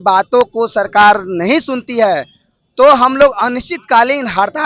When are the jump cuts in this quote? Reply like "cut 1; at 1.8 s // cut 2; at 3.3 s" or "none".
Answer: none